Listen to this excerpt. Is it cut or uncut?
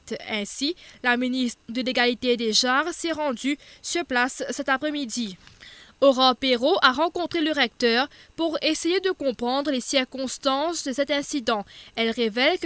cut